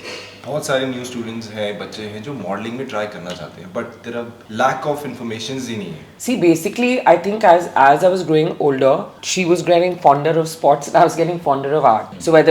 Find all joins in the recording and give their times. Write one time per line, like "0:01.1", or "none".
0:06.2